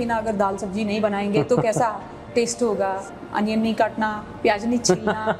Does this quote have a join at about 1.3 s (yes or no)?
no